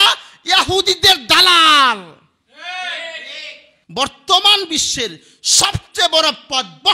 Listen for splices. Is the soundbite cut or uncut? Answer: cut